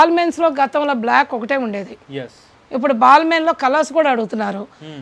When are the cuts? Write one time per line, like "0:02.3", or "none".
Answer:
none